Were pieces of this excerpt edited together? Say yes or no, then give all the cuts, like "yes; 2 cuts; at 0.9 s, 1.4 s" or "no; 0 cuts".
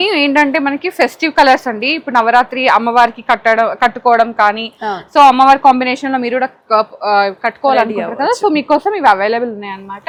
no; 0 cuts